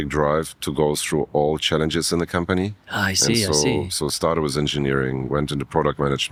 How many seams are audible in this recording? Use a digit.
0